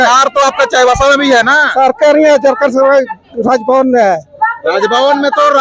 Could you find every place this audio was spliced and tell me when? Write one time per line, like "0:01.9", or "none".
none